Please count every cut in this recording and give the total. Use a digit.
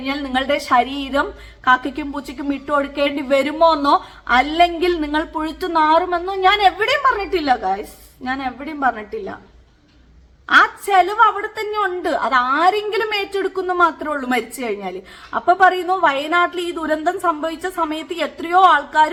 0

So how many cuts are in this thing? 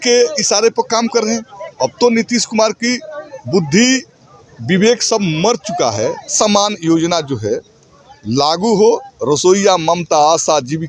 1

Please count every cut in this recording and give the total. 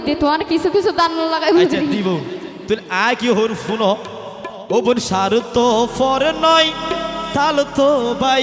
0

